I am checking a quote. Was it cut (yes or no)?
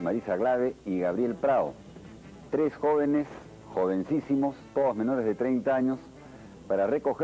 yes